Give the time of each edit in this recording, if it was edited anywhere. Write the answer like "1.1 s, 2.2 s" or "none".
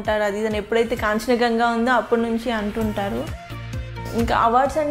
3.9 s